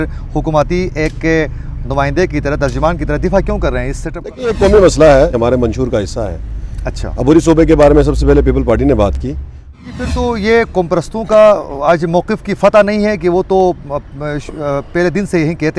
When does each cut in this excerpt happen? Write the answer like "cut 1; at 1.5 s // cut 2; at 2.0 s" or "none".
cut 1; at 5.3 s // cut 2; at 9.8 s